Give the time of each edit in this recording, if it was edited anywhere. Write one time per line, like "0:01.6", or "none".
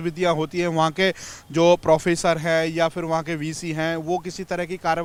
none